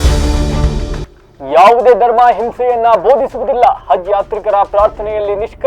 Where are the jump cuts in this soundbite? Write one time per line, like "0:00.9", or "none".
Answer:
0:01.1